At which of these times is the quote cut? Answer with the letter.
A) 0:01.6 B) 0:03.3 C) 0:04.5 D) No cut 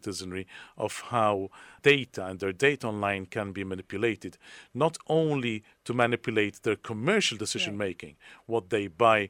A